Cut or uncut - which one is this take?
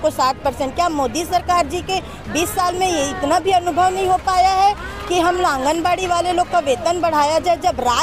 uncut